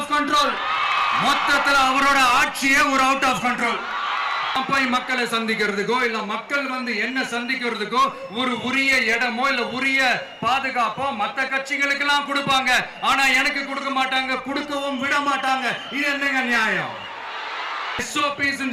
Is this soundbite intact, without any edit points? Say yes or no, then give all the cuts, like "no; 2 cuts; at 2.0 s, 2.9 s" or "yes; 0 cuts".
no; 2 cuts; at 4.6 s, 18.0 s